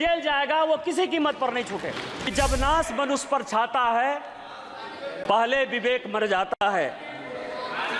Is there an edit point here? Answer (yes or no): yes